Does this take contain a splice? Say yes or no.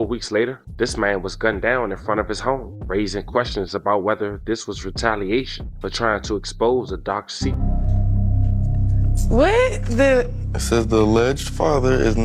yes